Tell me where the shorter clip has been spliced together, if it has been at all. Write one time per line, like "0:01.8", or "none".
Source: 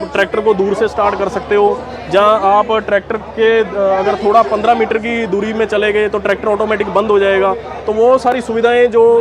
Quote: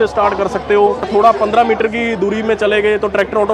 0:01.1